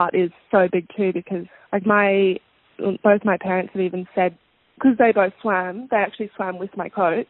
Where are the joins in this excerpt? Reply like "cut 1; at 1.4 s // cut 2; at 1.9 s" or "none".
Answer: none